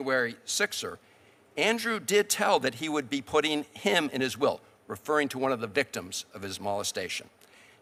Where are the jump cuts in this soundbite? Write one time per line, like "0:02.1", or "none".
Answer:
none